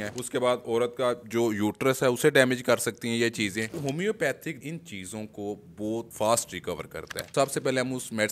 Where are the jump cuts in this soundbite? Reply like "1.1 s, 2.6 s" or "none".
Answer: 3.7 s, 4.6 s, 6.1 s, 7.3 s